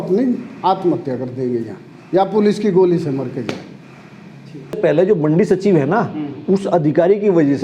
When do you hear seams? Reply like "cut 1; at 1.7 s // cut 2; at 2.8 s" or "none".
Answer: cut 1; at 4.8 s